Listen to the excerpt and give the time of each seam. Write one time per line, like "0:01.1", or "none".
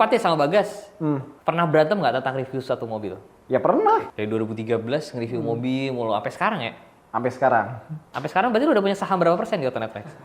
0:01.3
0:04.1